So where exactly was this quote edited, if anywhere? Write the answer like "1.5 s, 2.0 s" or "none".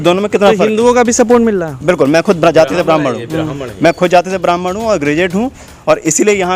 none